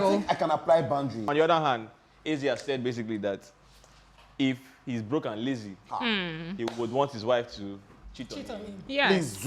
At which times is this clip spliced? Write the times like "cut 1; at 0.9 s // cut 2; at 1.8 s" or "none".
cut 1; at 1.3 s

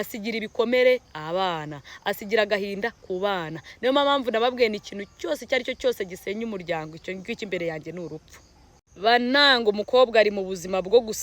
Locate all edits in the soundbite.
cut 1; at 8.9 s

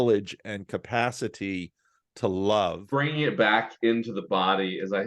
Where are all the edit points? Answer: cut 1; at 2.8 s

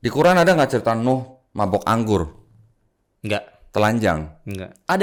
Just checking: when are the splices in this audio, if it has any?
none

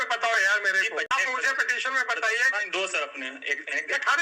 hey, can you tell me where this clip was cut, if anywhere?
cut 1; at 1.1 s

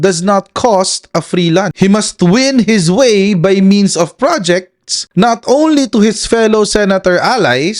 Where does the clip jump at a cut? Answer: cut 1; at 1.7 s

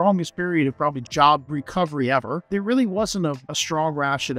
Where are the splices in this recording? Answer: cut 1; at 1.0 s // cut 2; at 2.4 s // cut 3; at 3.5 s

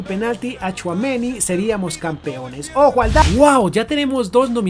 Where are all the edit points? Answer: cut 1; at 3.2 s

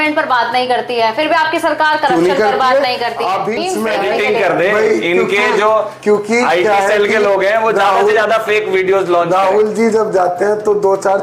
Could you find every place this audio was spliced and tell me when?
cut 1; at 3.6 s

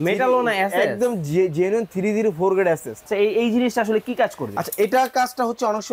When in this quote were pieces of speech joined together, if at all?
cut 1; at 2.9 s

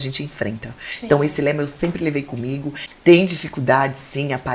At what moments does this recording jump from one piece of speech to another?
cut 1; at 2.8 s

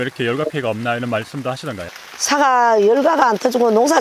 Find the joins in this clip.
cut 1; at 1.8 s

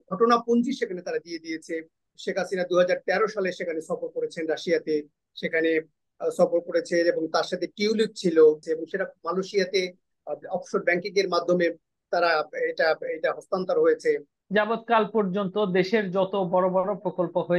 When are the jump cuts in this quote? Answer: cut 1; at 2.2 s // cut 2; at 8.7 s // cut 3; at 14.3 s

